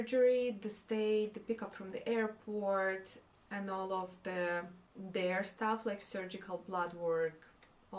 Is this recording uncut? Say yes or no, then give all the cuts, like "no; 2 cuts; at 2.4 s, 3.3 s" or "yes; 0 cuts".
yes; 0 cuts